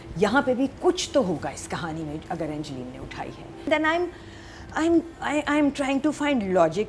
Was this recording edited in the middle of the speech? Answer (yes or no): yes